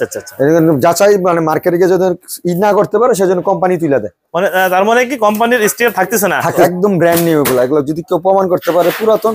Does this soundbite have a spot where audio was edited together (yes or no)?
yes